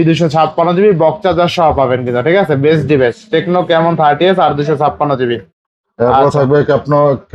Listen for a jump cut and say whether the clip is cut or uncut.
uncut